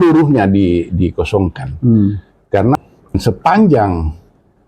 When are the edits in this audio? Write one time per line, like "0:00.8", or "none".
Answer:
0:03.2